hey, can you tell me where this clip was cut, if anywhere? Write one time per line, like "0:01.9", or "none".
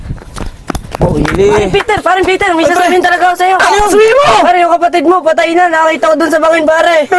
0:01.2
0:03.9